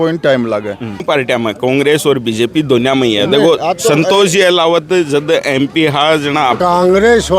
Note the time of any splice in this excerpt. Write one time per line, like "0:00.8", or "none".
0:01.0
0:06.6